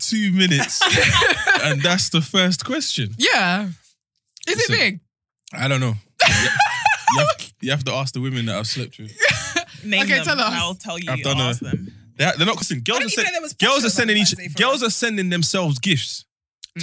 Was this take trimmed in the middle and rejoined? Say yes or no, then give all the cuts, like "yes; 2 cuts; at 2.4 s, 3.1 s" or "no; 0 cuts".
yes; 1 cut; at 12.6 s